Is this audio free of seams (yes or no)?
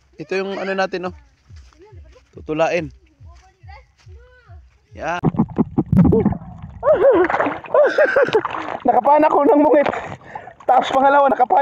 no